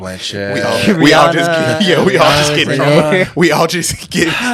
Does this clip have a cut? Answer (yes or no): no